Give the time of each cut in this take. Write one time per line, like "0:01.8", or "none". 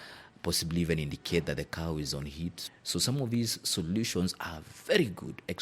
0:02.6

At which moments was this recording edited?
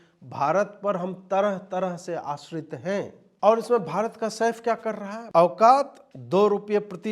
0:05.1

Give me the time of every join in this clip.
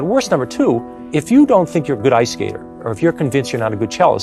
0:01.0

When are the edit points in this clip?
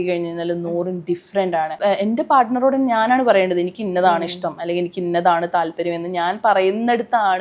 0:01.7

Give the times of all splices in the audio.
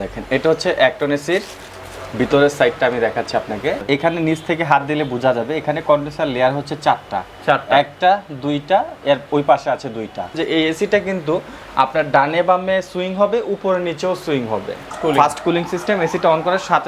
0:03.8
0:10.3
0:14.9

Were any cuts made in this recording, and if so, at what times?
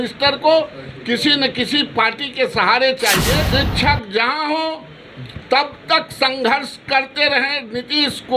0:03.4

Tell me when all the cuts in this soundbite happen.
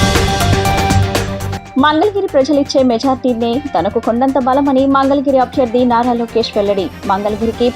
none

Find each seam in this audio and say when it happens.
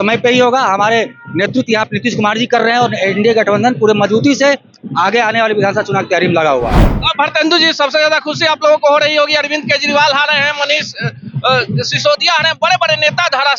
none

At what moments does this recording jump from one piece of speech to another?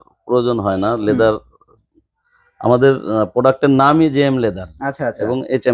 none

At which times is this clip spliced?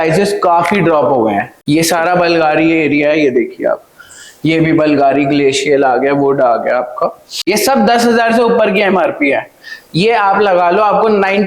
0:01.5
0:07.3

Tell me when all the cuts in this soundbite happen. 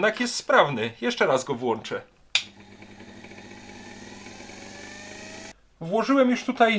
0:05.5

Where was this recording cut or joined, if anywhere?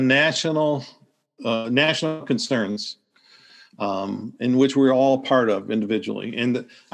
none

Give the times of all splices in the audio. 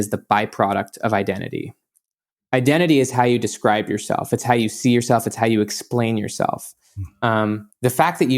0:02.1

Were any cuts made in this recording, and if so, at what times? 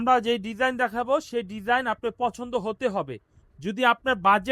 none

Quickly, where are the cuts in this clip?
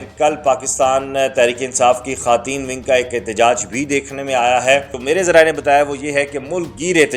0:04.9

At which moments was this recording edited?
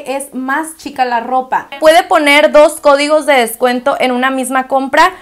0:01.8

